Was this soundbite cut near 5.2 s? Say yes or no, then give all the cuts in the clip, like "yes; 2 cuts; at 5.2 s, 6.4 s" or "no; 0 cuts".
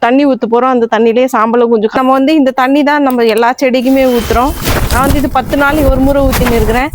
no; 1 cut; at 2.0 s